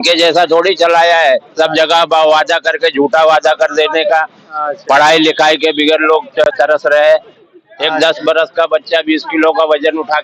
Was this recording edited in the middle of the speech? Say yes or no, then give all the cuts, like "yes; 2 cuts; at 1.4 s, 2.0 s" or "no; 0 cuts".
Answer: no; 0 cuts